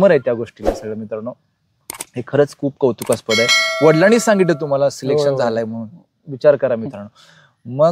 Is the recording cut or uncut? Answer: uncut